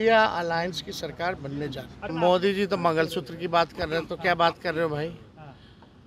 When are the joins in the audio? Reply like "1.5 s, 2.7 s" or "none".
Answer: 2.0 s